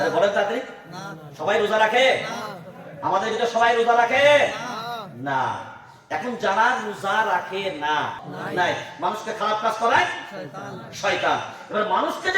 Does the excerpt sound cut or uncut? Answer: cut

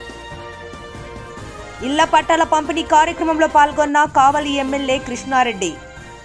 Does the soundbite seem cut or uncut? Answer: cut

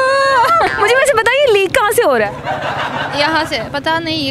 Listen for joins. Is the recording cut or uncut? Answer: uncut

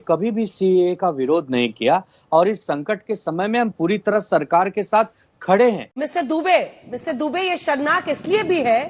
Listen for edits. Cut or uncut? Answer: cut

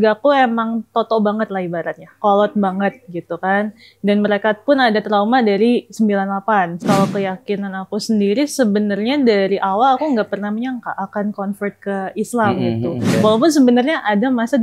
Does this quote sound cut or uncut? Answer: cut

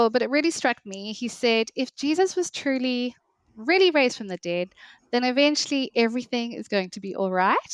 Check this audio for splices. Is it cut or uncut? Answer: uncut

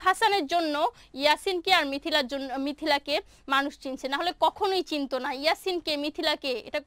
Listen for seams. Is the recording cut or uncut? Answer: uncut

